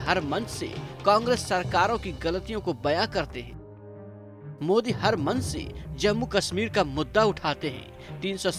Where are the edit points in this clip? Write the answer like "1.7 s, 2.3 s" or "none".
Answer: none